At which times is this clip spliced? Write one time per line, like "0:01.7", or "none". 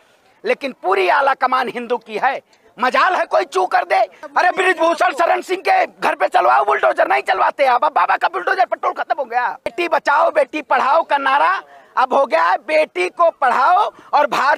0:04.2
0:09.7